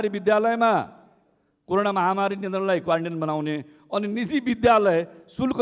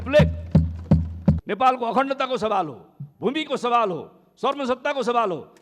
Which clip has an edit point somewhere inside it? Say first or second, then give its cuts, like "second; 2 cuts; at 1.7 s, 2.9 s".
second; 1 cut; at 1.5 s